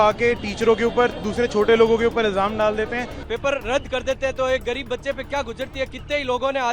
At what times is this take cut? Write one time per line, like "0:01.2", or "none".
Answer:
0:03.1

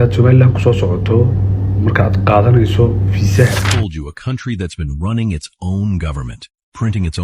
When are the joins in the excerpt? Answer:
0:03.7

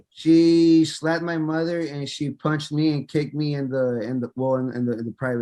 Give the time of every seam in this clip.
none

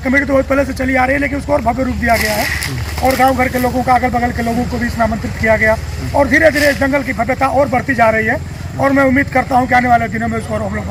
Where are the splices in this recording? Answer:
none

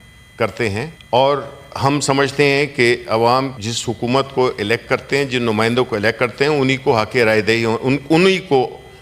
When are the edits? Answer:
0:01.0
0:03.6

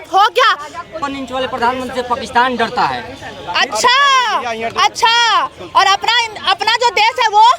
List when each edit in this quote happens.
0:01.0

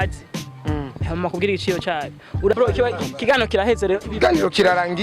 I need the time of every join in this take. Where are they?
0:02.5

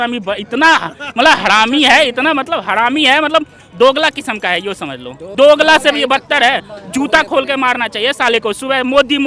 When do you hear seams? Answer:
0:05.3

